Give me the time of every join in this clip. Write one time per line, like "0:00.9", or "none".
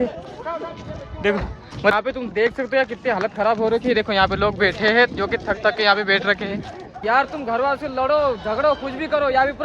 0:01.9
0:07.0

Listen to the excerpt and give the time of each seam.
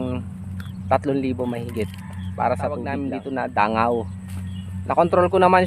0:03.0

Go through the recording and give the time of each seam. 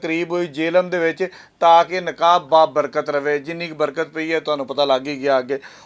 none

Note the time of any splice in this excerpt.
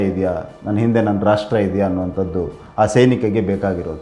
none

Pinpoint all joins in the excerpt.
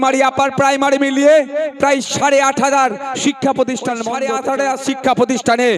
0:04.2

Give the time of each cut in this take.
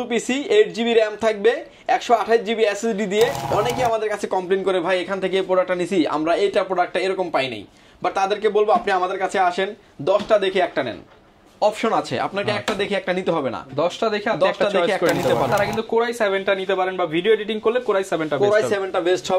0:03.4
0:15.5

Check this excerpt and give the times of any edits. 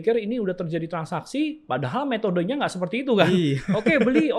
none

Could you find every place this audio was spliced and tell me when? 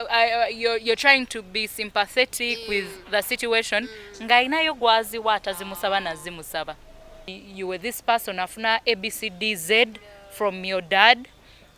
0:07.3

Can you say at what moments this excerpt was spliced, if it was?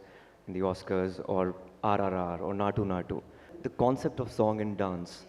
0:03.6

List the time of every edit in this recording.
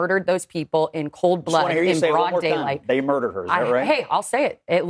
none

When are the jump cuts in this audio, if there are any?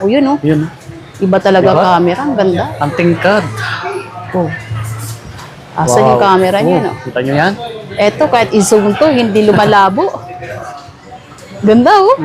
none

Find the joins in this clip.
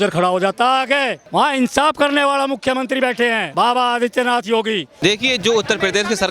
0:01.2
0:03.4
0:05.0

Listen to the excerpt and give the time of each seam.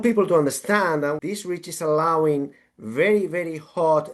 0:01.2

